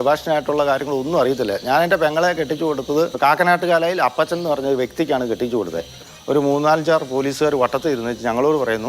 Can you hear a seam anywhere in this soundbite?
yes; 2 cuts; at 3.1 s, 6.1 s

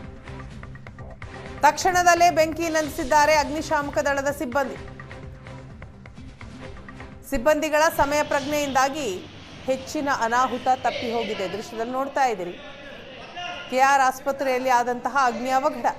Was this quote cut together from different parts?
yes; 1 cut; at 1.1 s

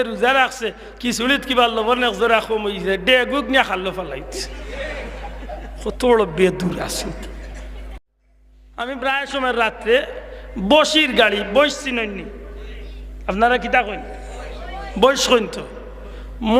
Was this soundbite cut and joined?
yes; 1 cut; at 7.9 s

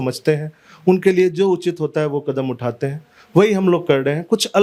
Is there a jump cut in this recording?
no; 0 cuts

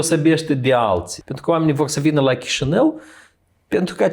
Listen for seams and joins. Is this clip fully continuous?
no; 1 cut; at 1.2 s

